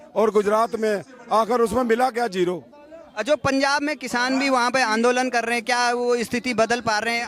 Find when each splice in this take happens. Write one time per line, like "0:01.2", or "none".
none